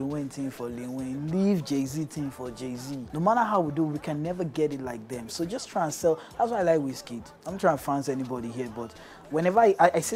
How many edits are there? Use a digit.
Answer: 1